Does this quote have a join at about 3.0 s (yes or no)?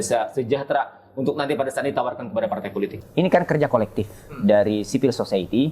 yes